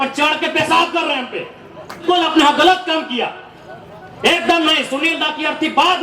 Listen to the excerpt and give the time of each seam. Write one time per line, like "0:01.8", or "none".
0:02.0